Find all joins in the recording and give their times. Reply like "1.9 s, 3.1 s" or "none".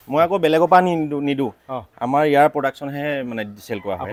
none